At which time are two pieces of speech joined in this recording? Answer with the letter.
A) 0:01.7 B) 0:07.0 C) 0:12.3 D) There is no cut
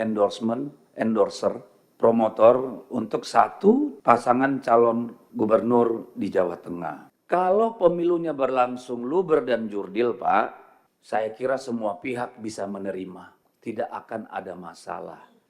B